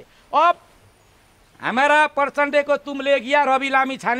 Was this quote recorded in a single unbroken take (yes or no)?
yes